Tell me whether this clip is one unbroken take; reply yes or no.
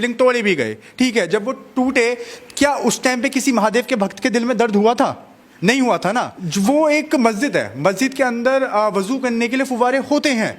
no